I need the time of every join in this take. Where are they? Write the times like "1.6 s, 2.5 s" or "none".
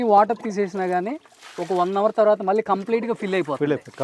none